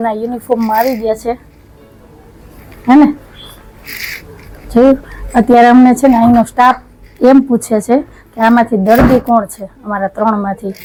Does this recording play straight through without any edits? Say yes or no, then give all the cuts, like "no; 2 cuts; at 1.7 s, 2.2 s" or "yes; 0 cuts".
yes; 0 cuts